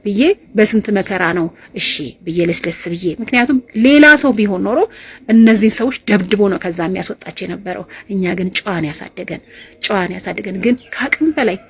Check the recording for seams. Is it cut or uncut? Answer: uncut